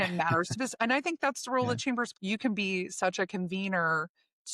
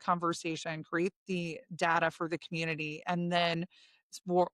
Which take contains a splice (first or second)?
first